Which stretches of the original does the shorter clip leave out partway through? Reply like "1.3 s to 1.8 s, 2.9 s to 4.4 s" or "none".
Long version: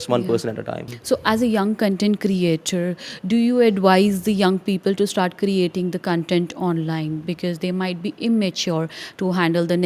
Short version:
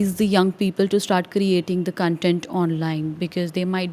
none